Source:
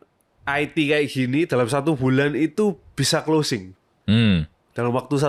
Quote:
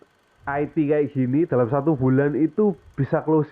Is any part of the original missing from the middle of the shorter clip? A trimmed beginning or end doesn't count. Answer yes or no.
no